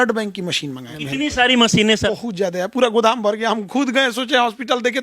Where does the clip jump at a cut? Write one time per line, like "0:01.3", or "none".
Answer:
0:00.9
0:02.1